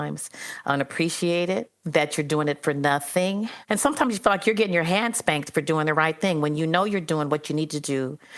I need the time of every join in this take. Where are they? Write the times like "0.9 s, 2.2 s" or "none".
1.8 s, 3.6 s